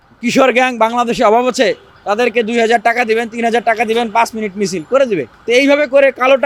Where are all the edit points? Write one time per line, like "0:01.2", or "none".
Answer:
none